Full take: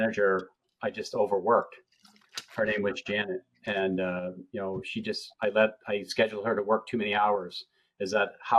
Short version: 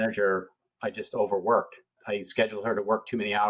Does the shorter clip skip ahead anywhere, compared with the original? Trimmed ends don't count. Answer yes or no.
yes